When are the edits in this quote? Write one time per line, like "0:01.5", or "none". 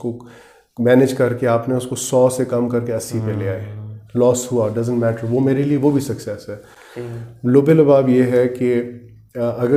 none